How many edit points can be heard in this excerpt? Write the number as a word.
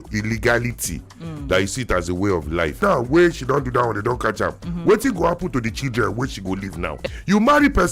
two